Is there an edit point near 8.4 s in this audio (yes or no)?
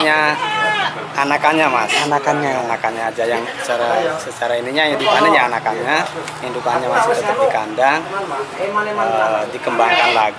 no